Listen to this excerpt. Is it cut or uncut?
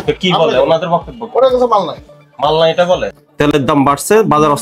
cut